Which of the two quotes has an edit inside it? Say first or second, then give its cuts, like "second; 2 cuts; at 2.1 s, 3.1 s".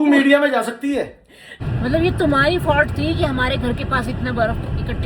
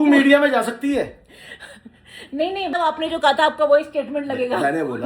first; 1 cut; at 1.8 s